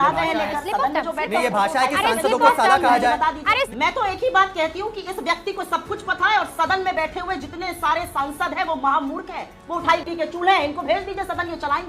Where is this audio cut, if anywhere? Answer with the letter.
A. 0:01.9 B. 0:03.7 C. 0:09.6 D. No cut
B